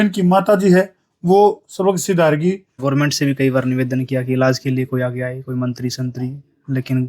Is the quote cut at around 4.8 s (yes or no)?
no